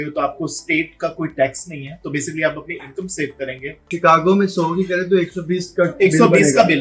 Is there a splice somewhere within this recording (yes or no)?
yes